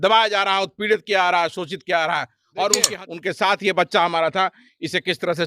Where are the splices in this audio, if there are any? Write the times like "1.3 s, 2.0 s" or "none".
3.0 s